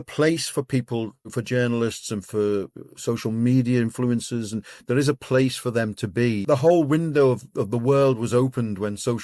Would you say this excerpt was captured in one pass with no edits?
no; 2 cuts; at 1.4 s, 6.4 s

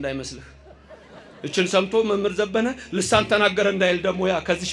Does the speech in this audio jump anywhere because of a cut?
no; 0 cuts

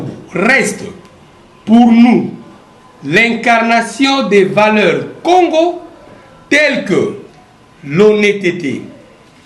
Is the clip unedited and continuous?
yes; 0 cuts

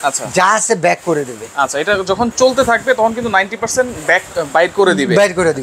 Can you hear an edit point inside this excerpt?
no; 0 cuts

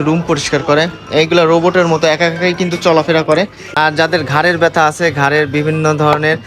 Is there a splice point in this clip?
yes; 1 cut; at 3.6 s

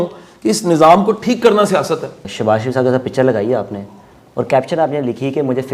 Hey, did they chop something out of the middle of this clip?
yes; 1 cut; at 2.2 s

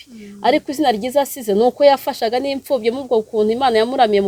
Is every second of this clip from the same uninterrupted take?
yes; 0 cuts

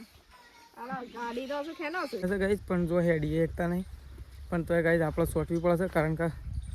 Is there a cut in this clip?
yes; 1 cut; at 2.3 s

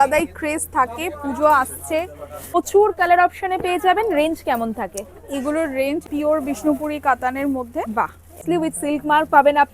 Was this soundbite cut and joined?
yes; 3 cuts; at 2.6 s, 6.0 s, 8.4 s

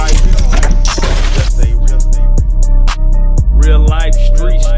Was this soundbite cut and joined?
no; 0 cuts

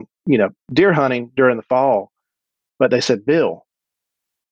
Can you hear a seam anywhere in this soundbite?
no; 0 cuts

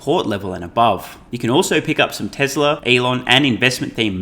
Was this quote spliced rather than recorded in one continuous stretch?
yes; 2 cuts; at 1.2 s, 2.8 s

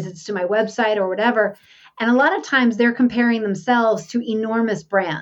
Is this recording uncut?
yes; 0 cuts

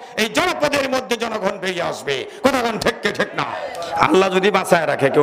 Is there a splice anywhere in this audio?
yes; 1 cut; at 3.7 s

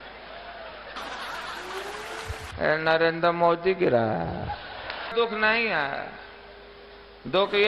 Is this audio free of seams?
no; 1 cut; at 5.0 s

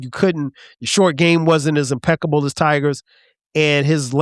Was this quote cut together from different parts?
no; 0 cuts

